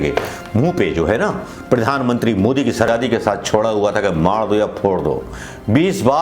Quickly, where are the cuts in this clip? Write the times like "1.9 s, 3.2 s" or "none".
2.9 s